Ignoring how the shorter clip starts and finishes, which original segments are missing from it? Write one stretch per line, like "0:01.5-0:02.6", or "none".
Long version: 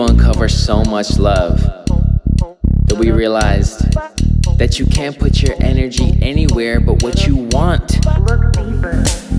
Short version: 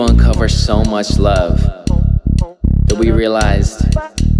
none

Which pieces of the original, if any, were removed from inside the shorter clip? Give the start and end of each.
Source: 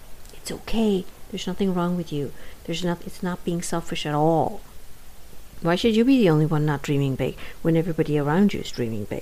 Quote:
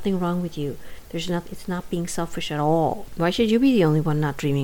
0:04.6-0:05.5

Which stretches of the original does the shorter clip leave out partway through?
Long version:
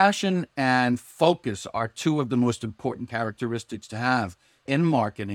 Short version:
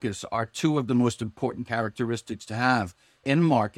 none

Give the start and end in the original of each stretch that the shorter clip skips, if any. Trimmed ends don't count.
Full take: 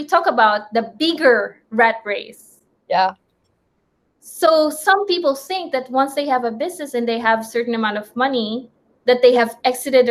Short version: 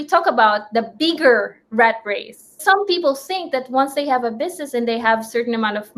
0:02.6-0:04.8

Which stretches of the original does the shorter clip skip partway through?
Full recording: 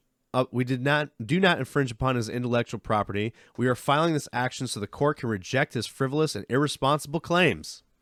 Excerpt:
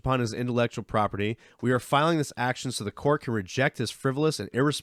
none

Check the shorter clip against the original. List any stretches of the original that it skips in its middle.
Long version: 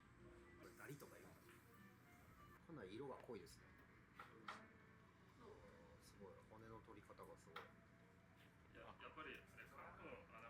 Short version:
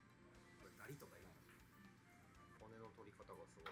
0:02.6-0:06.5

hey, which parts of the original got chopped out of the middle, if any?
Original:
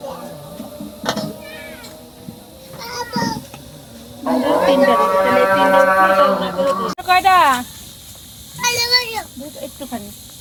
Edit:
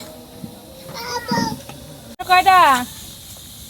0:04.0-0:06.9

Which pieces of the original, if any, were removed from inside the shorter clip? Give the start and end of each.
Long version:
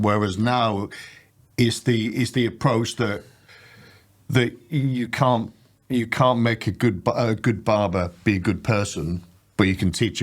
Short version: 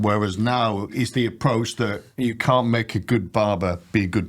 0:00.9-0:02.1
0:03.2-0:05.8
0:07.0-0:07.6

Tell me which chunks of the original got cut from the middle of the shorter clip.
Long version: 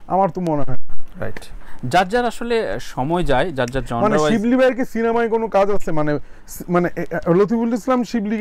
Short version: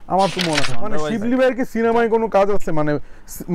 0:00.9-0:04.1

